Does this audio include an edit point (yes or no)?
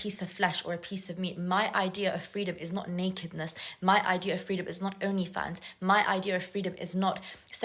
no